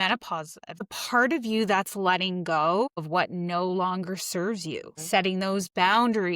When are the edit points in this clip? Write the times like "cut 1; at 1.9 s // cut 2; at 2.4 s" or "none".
cut 1; at 0.9 s // cut 2; at 3.0 s // cut 3; at 4.9 s